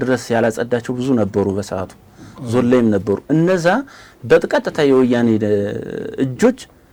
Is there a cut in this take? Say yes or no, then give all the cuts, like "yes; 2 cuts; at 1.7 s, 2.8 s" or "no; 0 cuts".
no; 0 cuts